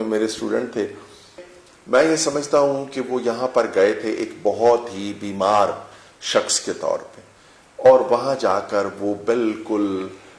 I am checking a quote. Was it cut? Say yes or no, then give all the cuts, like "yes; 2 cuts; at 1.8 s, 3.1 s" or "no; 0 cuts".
yes; 1 cut; at 1.5 s